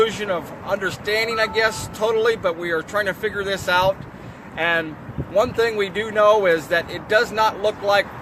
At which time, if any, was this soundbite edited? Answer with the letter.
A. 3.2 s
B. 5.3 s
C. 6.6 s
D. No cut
A